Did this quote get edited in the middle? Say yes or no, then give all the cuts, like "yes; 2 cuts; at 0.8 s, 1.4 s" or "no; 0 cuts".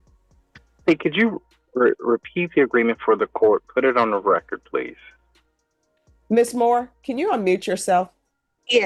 no; 0 cuts